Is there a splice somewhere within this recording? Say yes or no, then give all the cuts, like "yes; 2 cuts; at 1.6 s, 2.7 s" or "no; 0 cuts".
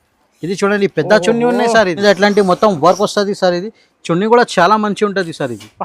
yes; 1 cut; at 2.0 s